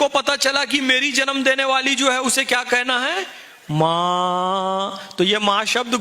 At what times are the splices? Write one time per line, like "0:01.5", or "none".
none